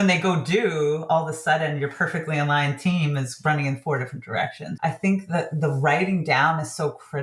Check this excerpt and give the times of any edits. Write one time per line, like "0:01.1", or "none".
0:04.7